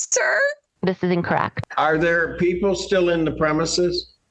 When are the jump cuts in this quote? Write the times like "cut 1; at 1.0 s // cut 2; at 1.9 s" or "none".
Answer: cut 1; at 1.5 s